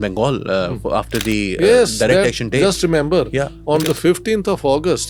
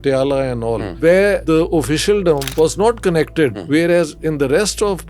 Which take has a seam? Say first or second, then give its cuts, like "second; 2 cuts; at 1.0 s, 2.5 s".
second; 4 cuts; at 0.9 s, 1.4 s, 2.5 s, 3.6 s